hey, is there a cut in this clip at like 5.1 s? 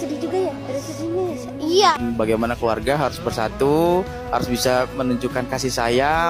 no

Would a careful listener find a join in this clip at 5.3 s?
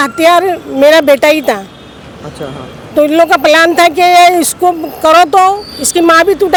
no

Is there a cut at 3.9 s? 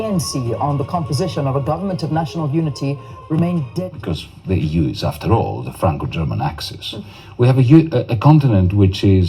yes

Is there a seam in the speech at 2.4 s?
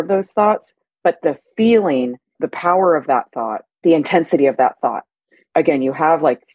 yes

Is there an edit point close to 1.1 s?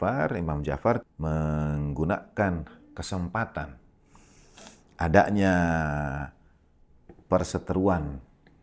yes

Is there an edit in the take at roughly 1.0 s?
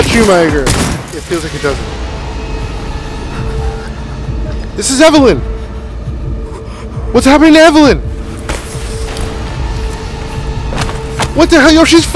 yes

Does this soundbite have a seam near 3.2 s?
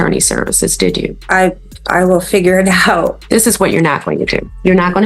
yes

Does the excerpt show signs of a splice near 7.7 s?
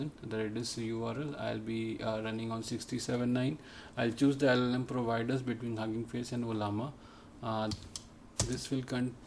yes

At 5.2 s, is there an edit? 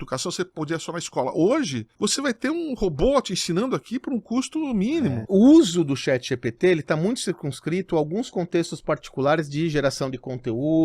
yes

